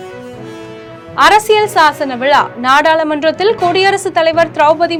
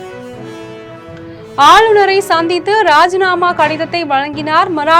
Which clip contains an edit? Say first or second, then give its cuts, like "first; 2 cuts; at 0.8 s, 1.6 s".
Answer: second; 1 cut; at 1.1 s